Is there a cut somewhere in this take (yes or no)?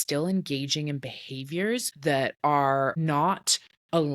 yes